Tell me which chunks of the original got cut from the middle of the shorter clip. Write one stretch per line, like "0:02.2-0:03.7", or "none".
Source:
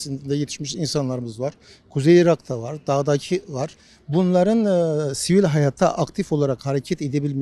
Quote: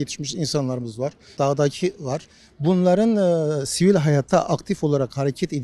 0:01.6-0:02.7